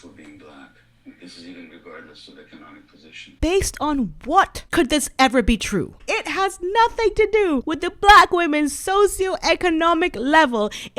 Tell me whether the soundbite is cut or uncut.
cut